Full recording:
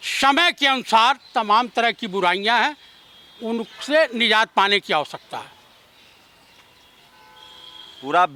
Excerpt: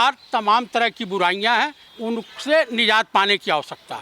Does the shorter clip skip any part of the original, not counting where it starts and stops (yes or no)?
yes